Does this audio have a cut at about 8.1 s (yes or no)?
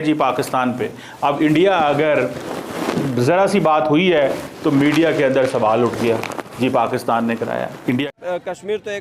yes